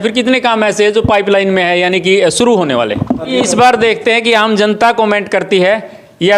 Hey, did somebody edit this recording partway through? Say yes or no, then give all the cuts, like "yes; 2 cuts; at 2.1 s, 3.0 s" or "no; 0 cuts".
yes; 1 cut; at 3.3 s